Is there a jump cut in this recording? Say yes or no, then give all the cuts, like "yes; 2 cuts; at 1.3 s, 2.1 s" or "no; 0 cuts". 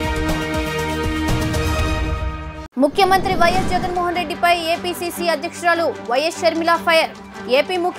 no; 0 cuts